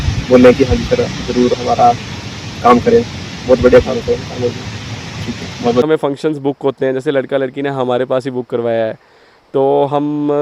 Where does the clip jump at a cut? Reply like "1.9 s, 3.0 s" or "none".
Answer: 5.9 s